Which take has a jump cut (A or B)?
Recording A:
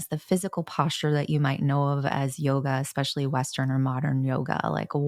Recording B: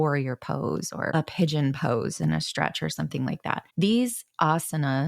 B